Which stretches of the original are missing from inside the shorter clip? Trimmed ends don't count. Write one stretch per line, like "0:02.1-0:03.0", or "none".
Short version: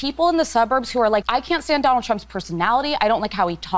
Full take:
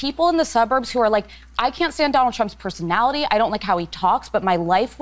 0:01.3-0:01.6